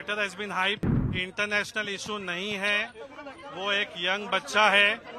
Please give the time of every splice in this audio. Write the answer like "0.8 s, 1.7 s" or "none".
1.0 s